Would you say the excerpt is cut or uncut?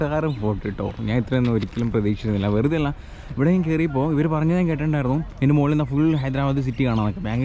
uncut